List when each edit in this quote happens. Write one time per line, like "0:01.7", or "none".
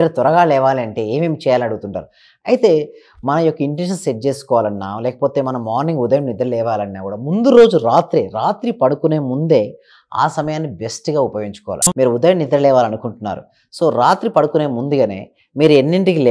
0:11.8